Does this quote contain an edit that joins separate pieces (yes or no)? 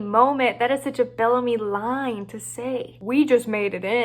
no